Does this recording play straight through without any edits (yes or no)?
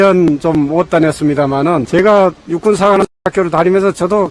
no